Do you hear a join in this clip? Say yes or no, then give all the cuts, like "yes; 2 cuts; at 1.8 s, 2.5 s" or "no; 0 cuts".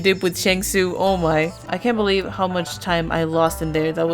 yes; 1 cut; at 1.6 s